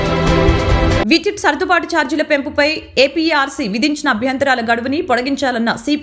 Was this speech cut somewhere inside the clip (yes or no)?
no